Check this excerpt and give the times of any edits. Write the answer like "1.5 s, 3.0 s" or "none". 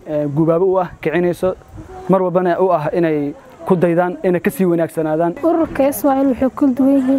5.4 s